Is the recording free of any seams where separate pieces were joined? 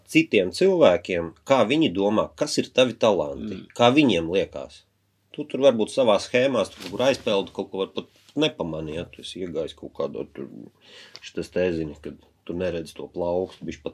yes; 0 cuts

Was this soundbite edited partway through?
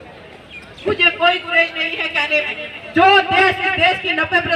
no; 0 cuts

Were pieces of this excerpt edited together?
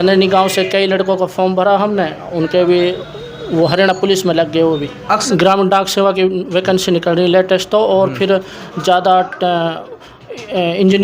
yes; 1 cut; at 5.2 s

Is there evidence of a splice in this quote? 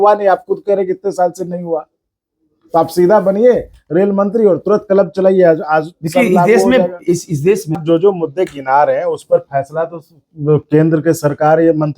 yes; 1 cut; at 7.8 s

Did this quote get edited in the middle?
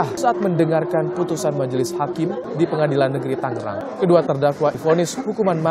yes; 1 cut; at 4.8 s

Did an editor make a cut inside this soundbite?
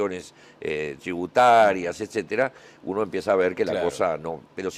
yes; 1 cut; at 2.3 s

